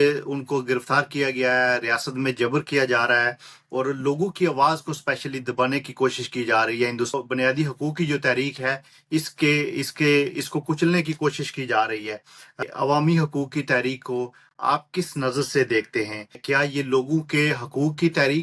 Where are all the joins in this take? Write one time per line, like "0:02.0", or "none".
0:07.1
0:12.7
0:16.4